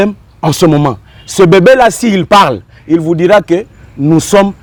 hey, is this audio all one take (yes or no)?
yes